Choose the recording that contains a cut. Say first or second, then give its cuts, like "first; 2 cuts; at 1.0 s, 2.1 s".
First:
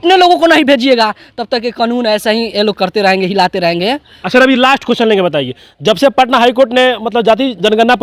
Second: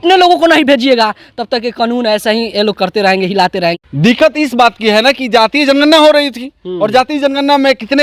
second; 1 cut; at 3.8 s